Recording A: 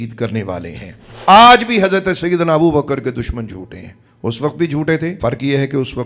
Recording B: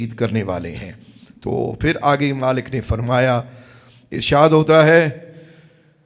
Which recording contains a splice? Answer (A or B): A